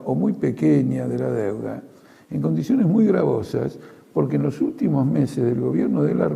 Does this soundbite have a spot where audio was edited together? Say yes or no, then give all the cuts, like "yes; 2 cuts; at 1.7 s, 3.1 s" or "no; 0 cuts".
yes; 1 cut; at 4.2 s